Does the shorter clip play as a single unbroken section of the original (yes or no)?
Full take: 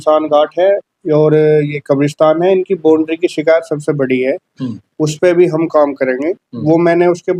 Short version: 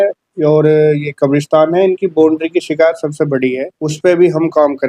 no